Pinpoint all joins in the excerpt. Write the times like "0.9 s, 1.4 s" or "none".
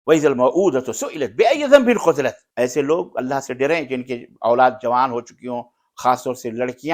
2.4 s